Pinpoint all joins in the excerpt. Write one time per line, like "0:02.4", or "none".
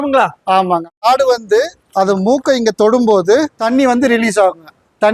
0:01.0
0:03.6